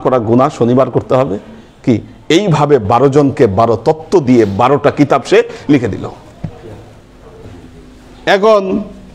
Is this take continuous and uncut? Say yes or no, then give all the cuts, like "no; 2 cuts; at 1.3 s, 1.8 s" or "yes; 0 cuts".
no; 1 cut; at 7.5 s